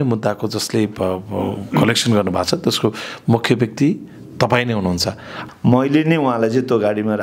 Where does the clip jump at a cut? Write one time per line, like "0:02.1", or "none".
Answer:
0:05.4